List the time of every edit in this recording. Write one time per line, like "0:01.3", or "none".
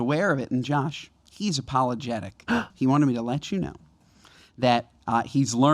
0:02.6